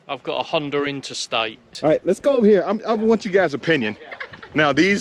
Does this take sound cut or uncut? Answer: cut